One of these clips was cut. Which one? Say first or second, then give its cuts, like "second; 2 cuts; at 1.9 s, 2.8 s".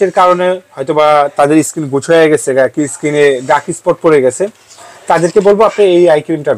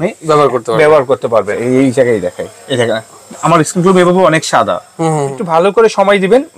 second; 2 cuts; at 1.5 s, 5.4 s